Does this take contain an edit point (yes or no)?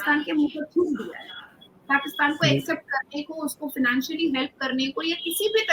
no